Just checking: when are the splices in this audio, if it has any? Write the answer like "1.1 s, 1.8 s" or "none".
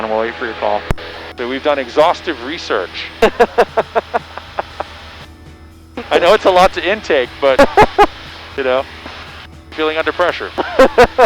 1.4 s, 9.7 s